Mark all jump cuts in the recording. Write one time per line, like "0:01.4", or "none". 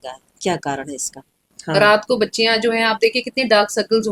0:01.5

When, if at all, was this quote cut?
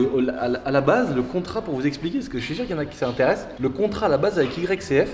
none

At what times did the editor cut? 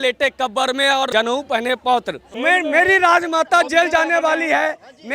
0:01.1
0:02.2

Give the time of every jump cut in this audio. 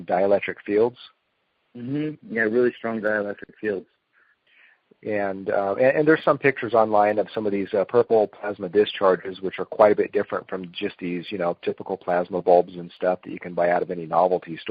0:06.1

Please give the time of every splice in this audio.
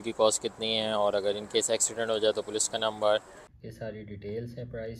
0:03.3

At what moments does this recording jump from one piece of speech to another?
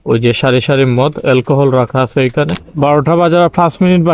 0:02.6

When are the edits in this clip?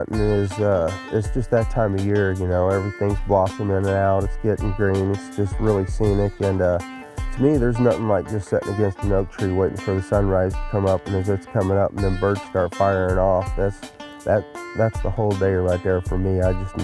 none

